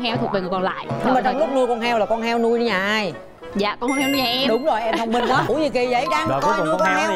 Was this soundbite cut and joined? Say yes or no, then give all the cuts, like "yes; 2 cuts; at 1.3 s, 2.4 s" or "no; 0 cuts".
yes; 2 cuts; at 1.0 s, 5.5 s